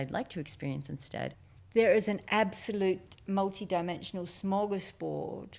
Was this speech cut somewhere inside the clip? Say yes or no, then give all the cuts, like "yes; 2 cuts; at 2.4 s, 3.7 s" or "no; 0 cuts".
yes; 1 cut; at 1.5 s